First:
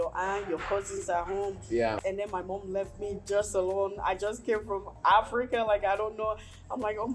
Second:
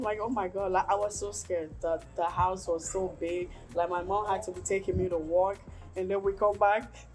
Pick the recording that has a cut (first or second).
first